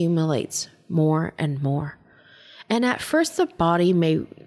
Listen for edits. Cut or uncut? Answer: uncut